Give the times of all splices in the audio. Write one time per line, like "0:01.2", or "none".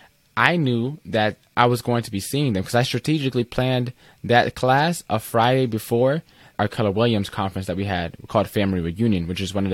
0:06.5